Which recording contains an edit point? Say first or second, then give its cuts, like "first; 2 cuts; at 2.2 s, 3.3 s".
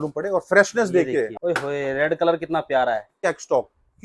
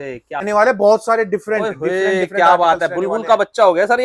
first; 2 cuts; at 1.3 s, 3.2 s